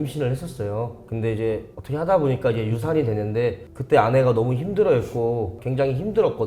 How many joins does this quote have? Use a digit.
1